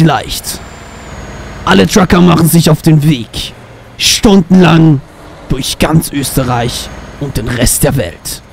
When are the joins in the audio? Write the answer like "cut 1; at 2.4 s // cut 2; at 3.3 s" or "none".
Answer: none